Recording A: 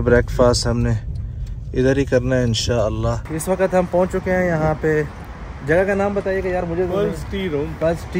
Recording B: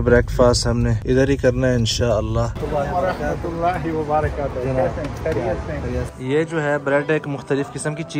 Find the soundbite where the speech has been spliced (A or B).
B